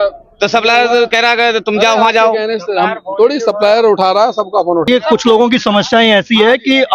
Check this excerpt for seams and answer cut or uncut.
cut